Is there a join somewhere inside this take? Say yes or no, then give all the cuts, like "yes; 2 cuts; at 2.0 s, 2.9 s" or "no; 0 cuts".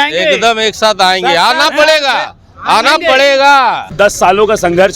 yes; 1 cut; at 3.9 s